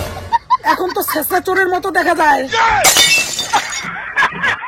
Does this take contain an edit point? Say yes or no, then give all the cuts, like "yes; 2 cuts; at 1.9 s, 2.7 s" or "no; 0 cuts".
no; 0 cuts